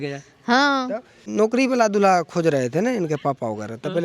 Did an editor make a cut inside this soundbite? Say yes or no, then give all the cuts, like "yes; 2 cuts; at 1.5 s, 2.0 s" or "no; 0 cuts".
yes; 1 cut; at 1.2 s